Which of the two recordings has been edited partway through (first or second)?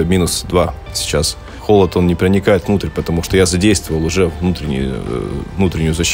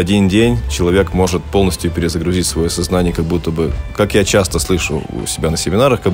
first